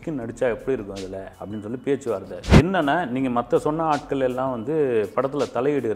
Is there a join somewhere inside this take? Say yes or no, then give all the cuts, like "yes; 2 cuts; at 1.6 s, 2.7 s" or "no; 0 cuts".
yes; 1 cut; at 2.6 s